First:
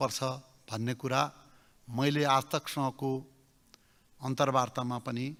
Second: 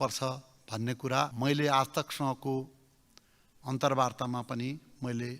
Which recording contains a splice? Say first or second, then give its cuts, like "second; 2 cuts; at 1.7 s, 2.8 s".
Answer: second; 1 cut; at 1.3 s